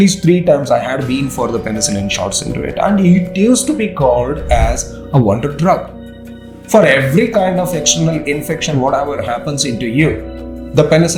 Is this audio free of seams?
yes; 0 cuts

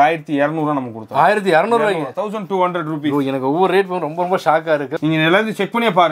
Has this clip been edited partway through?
yes; 1 cut; at 5.0 s

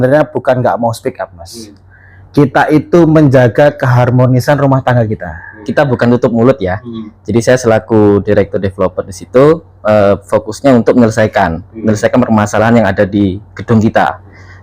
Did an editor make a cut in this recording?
yes; 1 cut; at 5.7 s

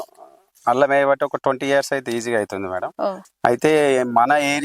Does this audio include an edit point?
yes; 1 cut; at 3.2 s

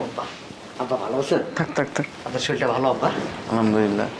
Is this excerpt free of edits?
yes; 0 cuts

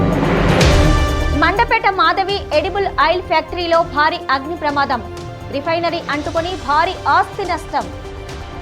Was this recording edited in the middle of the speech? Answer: yes; 1 cut; at 0.9 s

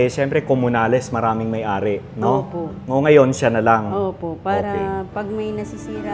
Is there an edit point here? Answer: no; 0 cuts

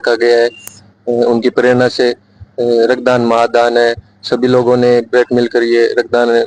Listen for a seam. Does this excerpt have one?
no; 0 cuts

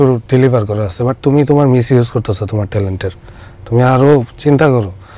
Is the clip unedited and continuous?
yes; 0 cuts

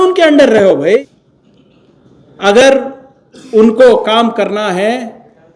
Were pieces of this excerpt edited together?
yes; 1 cut; at 1.0 s

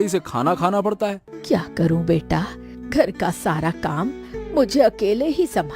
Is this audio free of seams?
no; 1 cut; at 1.3 s

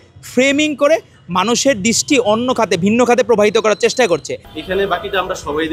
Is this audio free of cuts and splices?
no; 1 cut; at 4.4 s

